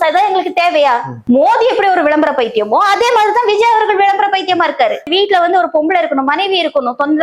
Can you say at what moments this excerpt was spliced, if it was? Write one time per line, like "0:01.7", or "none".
0:01.1
0:05.1